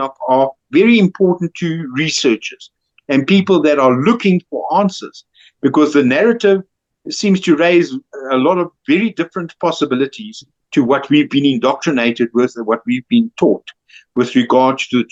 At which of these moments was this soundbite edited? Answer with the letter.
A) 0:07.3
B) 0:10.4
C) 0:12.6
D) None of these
D